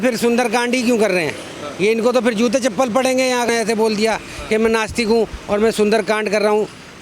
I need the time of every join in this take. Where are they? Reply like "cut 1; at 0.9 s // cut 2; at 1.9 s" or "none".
cut 1; at 3.5 s